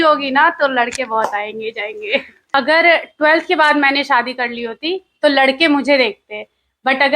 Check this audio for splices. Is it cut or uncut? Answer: cut